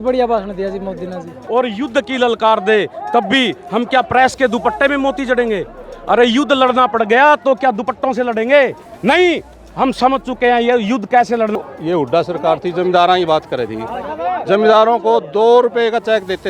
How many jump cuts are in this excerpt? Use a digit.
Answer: 2